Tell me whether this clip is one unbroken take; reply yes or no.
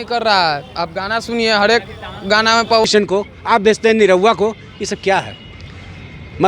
no